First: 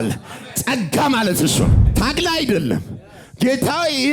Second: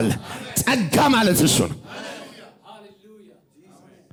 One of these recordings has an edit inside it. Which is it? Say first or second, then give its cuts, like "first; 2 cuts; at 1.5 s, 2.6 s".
first; 1 cut; at 1.8 s